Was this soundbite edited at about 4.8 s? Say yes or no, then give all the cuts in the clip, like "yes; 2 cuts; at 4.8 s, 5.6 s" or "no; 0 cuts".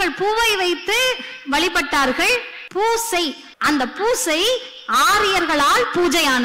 no; 2 cuts; at 2.6 s, 3.5 s